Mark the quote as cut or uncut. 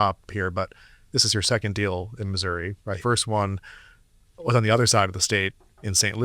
cut